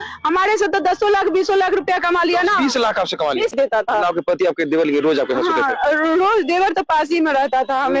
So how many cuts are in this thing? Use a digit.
1